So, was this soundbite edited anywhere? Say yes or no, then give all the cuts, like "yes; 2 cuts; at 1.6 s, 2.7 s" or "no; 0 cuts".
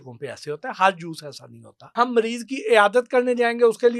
yes; 1 cut; at 1.8 s